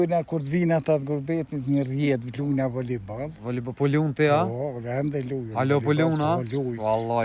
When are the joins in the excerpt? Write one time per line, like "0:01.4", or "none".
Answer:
none